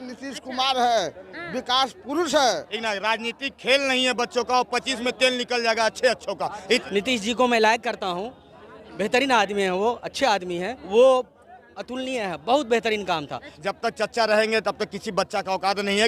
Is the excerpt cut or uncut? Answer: cut